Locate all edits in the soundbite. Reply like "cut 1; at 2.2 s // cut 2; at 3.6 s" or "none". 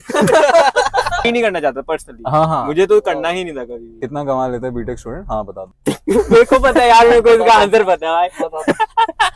cut 1; at 1.3 s // cut 2; at 4.1 s